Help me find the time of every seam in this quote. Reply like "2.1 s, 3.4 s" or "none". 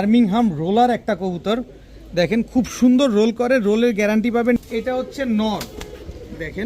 4.6 s